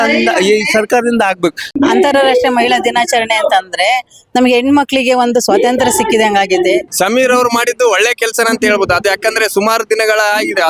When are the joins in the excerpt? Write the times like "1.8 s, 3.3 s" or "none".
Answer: 1.6 s, 6.9 s